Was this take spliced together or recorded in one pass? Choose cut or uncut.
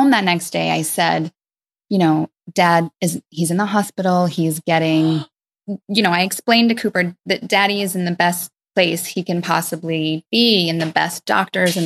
uncut